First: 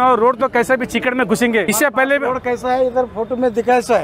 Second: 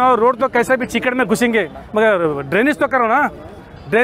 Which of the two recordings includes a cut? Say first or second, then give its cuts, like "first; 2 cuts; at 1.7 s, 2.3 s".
first; 1 cut; at 1.7 s